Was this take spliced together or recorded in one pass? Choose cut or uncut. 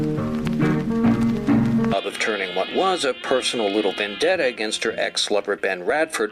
uncut